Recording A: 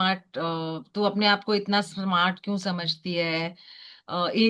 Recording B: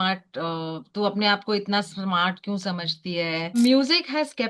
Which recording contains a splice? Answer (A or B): B